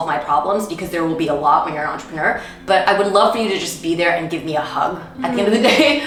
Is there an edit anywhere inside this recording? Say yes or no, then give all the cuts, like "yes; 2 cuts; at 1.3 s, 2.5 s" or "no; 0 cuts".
no; 0 cuts